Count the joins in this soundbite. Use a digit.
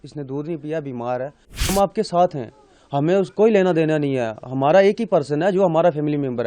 1